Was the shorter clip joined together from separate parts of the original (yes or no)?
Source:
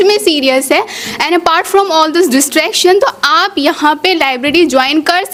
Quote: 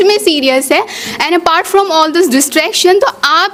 no